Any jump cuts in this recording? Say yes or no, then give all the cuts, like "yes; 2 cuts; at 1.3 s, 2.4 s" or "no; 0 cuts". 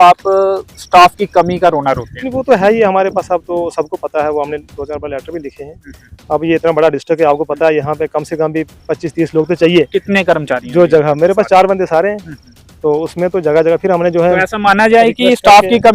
no; 0 cuts